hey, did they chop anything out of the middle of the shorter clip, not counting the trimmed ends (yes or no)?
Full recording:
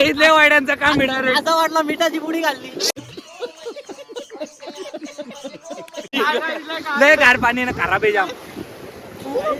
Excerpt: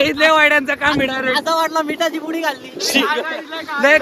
yes